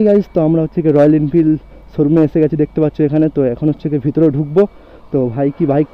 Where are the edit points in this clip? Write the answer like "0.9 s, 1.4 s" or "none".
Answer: none